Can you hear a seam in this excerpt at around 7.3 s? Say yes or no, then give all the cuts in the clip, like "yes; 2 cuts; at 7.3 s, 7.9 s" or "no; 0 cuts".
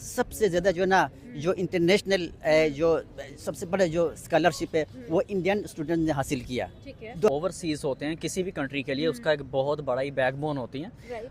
yes; 1 cut; at 7.3 s